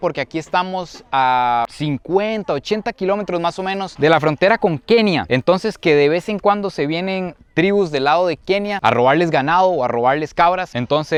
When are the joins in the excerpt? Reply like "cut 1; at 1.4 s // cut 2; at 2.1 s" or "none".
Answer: none